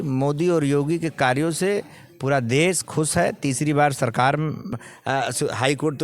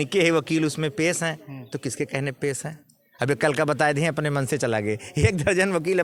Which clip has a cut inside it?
first; 1 cut; at 4.7 s

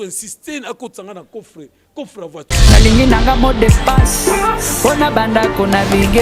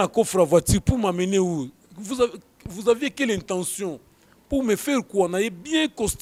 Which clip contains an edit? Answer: first; 1 cut; at 2.4 s

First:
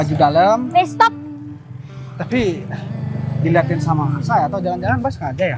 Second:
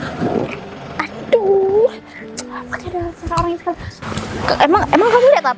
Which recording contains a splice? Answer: second; 1 cut; at 3.9 s

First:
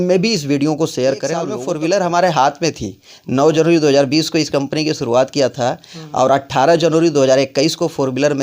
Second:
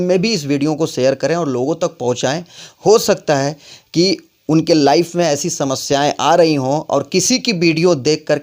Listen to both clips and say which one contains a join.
first; 1 cut; at 1.6 s

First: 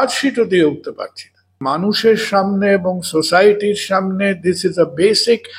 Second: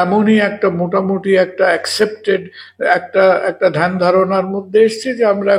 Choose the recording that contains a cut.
first; 1 cut; at 1.6 s

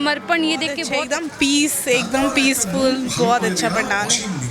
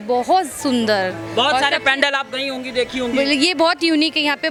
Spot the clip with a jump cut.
first; 1 cut; at 0.9 s

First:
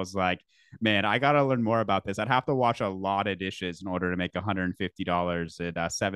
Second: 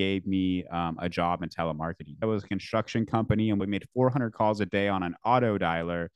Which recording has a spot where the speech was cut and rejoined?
second; 2 cuts; at 2.2 s, 3.6 s

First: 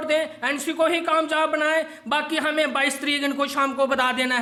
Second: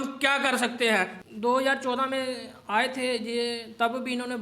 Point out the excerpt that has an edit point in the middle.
second; 1 cut; at 1.1 s

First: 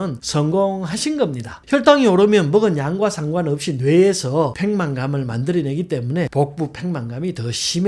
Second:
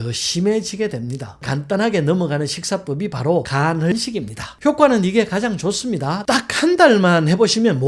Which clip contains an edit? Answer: second; 2 cuts; at 1.4 s, 3.9 s

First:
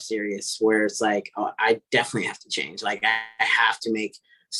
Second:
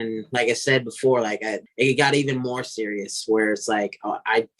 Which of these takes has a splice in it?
second; 1 cut; at 1.5 s

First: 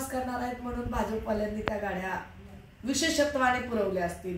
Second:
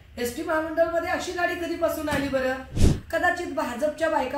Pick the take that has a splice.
second; 1 cut; at 2.8 s

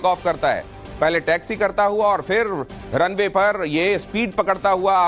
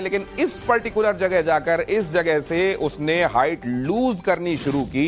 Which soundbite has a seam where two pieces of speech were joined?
second; 1 cut; at 2.5 s

